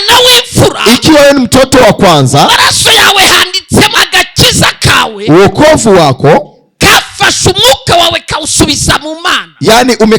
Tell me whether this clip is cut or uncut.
cut